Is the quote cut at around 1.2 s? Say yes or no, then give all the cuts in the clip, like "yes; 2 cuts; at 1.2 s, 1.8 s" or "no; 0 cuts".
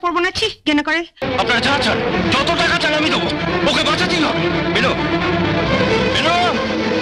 yes; 1 cut; at 1.2 s